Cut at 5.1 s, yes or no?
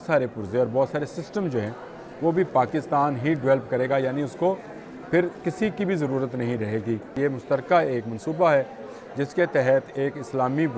no